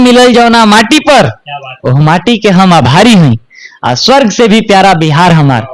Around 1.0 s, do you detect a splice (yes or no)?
no